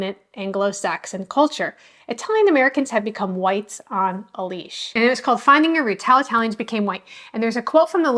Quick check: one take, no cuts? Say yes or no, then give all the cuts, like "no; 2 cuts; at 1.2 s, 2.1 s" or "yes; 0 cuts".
no; 1 cut; at 5.0 s